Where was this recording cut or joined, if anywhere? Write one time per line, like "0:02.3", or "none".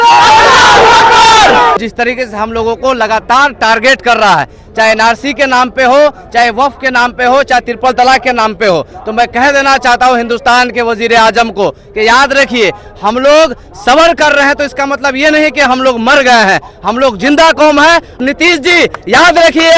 0:01.8
0:18.2

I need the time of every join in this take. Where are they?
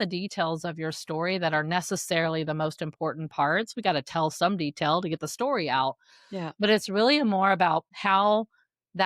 0:07.9

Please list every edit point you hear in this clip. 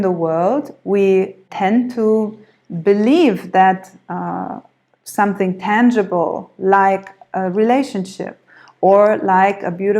0:01.4

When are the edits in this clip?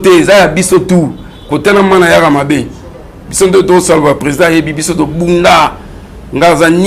none

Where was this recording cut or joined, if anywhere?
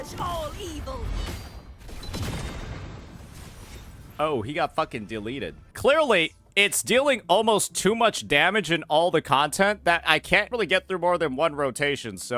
0:05.7

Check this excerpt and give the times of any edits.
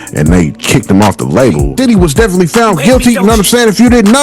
0:01.7

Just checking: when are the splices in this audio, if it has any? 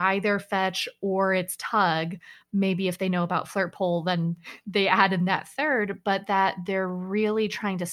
none

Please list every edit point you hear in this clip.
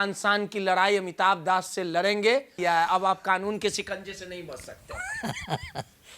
0:02.6

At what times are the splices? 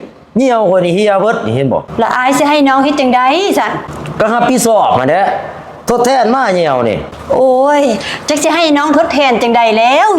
0:01.9

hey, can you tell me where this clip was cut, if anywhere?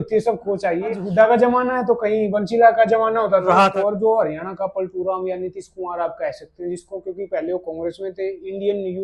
0:01.0
0:03.6

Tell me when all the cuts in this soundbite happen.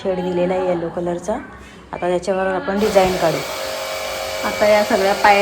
0:03.5

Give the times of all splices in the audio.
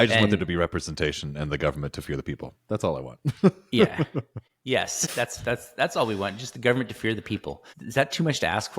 0:05.0
0:07.7

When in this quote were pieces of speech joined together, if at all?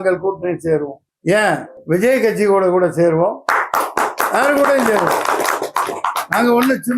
0:01.0
0:01.7

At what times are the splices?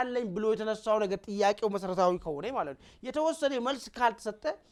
none

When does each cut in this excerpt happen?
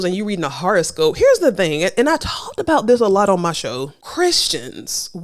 none

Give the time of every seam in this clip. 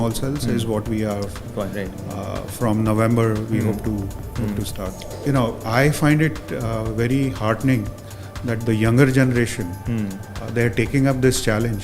0:05.0

